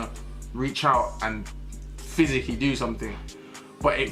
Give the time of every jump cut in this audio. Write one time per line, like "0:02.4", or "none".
none